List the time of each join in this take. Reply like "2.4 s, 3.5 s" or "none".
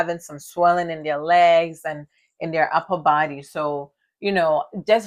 none